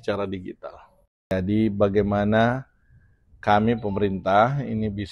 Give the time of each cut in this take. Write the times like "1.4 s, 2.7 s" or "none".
1.3 s